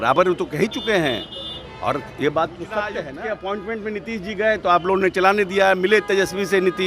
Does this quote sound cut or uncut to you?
cut